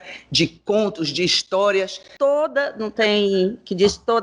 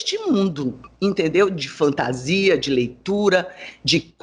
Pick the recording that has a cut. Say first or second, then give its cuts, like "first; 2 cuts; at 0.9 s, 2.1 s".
first; 1 cut; at 2.0 s